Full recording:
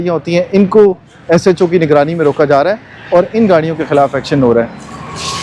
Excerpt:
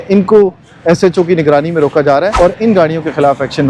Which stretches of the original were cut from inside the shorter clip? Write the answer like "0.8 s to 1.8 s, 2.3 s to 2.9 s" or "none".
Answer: 2.7 s to 3.0 s